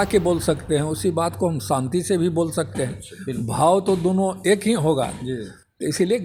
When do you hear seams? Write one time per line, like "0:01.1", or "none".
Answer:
none